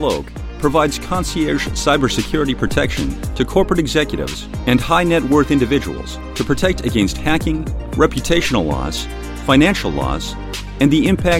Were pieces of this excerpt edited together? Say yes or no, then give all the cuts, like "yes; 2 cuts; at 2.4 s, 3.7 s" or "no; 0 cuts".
no; 0 cuts